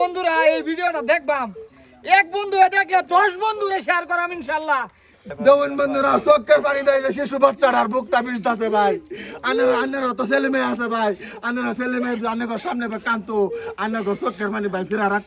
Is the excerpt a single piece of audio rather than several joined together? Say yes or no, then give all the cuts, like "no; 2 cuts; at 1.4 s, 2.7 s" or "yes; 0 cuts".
no; 1 cut; at 5.2 s